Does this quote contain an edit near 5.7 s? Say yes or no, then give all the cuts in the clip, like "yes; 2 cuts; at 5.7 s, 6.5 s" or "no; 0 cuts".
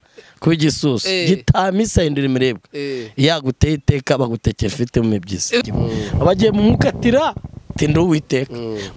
yes; 1 cut; at 5.7 s